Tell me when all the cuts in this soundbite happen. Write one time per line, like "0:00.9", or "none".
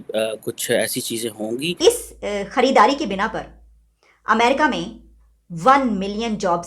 0:01.8